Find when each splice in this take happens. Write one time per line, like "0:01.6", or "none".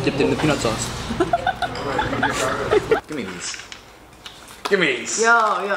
0:03.1